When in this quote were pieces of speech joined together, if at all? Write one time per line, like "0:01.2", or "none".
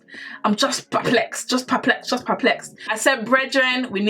0:02.8